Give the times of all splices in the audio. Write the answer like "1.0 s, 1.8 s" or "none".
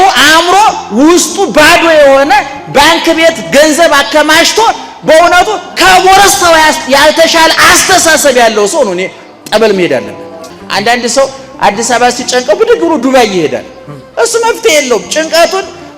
10.5 s